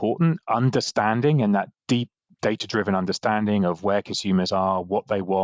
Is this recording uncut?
yes; 0 cuts

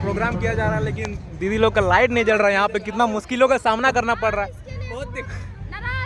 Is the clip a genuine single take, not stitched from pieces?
yes; 0 cuts

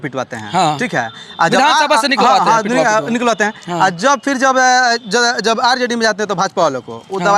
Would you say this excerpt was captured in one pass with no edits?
yes; 0 cuts

